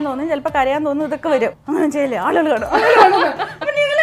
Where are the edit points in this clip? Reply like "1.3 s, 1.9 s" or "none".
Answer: 1.6 s